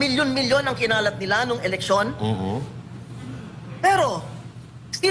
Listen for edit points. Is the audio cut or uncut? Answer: uncut